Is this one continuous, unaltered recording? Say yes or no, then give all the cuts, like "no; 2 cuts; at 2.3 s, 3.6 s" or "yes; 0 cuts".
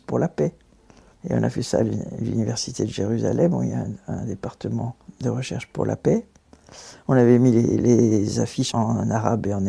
yes; 0 cuts